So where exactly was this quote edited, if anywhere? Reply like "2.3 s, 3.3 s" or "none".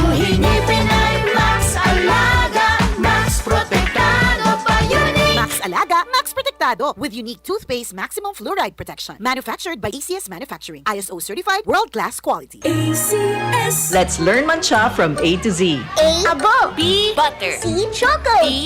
13.8 s